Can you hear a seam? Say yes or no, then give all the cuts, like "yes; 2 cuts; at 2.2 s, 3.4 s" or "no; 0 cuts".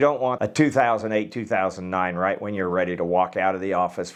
no; 0 cuts